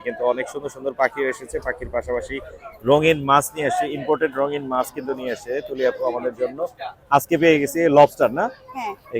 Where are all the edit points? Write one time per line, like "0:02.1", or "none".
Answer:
none